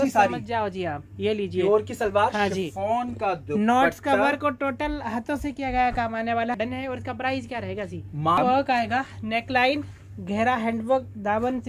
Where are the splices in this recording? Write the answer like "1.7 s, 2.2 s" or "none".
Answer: 6.5 s, 8.4 s